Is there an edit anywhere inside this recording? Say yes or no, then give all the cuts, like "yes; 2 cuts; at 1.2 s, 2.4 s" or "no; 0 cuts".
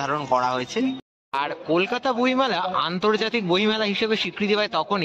yes; 1 cut; at 1.1 s